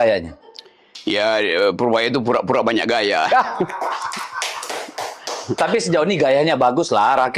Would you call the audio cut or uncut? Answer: uncut